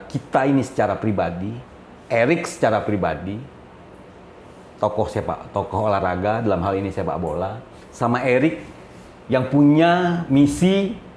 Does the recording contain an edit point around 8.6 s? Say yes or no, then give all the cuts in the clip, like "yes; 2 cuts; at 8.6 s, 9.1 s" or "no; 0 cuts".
no; 0 cuts